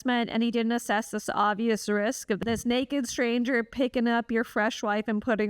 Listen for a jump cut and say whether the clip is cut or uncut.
cut